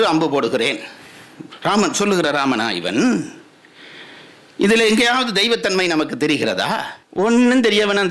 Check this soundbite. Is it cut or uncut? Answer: cut